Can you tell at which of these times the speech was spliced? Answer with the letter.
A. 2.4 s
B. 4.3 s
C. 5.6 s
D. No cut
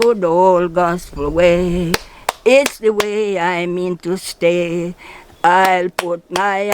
D